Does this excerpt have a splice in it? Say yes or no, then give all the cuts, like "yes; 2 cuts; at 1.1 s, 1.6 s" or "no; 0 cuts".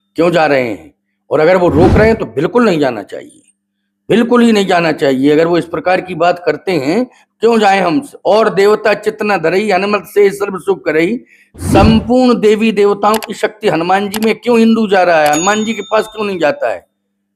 no; 0 cuts